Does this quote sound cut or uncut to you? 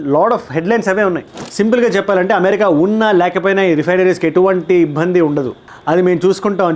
cut